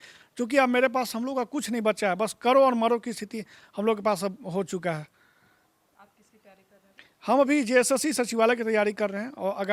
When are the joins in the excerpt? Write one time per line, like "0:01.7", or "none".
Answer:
none